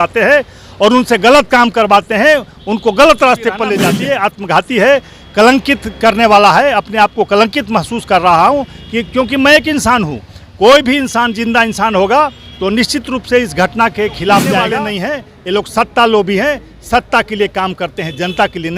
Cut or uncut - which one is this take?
cut